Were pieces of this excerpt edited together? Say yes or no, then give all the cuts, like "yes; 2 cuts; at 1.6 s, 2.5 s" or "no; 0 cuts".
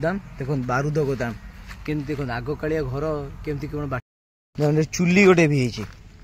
yes; 1 cut; at 4.0 s